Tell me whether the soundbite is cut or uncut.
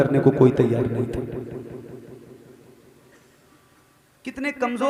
uncut